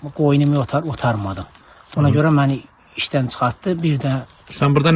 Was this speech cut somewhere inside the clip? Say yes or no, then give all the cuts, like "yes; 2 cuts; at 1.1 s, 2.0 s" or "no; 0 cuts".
no; 0 cuts